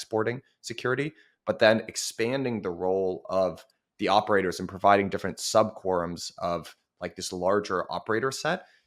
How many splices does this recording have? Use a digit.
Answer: 0